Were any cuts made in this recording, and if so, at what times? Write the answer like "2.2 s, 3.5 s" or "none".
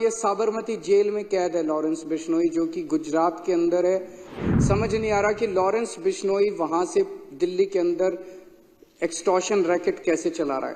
4.4 s